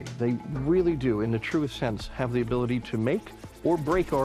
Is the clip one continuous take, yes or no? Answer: yes